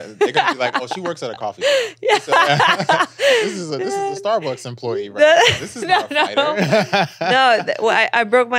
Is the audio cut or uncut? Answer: uncut